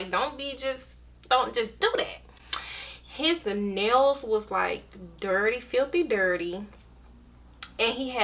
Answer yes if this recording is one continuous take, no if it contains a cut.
no